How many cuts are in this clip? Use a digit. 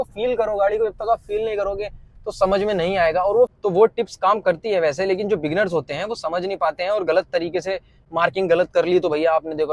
1